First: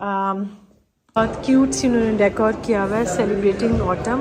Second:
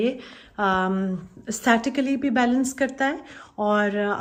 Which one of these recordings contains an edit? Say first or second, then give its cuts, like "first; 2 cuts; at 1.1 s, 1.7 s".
first; 1 cut; at 1.2 s